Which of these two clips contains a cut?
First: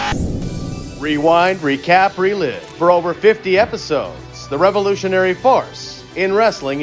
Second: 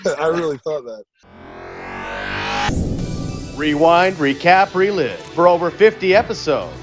second; 1 cut; at 1.4 s

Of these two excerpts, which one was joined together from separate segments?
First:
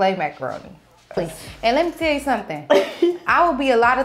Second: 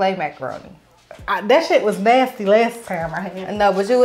first; 1 cut; at 1.2 s

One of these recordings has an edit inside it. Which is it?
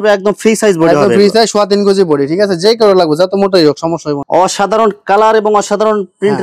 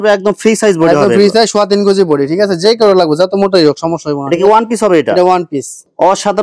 first; 1 cut; at 4.2 s

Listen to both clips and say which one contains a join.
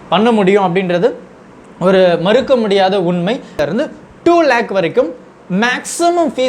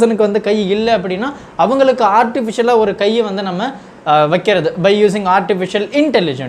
first; 1 cut; at 3.6 s

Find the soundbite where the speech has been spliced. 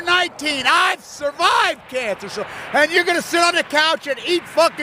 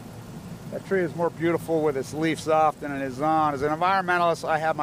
second; 1 cut; at 3.2 s

